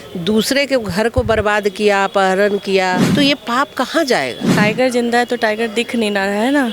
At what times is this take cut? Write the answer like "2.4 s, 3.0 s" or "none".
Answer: 3.0 s, 4.5 s

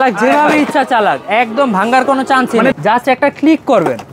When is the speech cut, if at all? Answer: 2.8 s

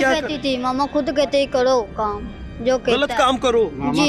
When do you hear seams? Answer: none

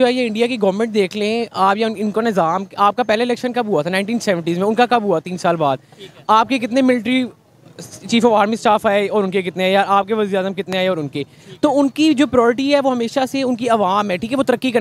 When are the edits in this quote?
none

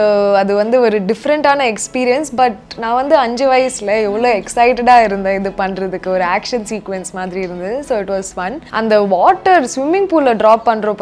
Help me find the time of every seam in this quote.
8.6 s

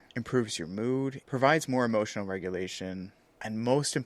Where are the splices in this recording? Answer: 1.2 s

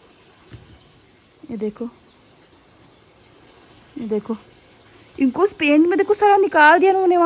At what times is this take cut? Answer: none

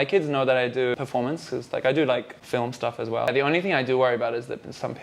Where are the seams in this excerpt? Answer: 1.0 s, 3.3 s

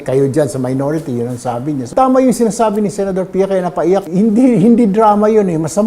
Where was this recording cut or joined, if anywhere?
1.9 s, 4.1 s

